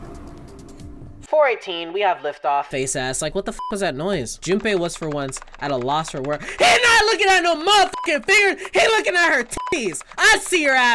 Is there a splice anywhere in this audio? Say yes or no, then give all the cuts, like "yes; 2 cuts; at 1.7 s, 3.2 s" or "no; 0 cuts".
yes; 1 cut; at 4.4 s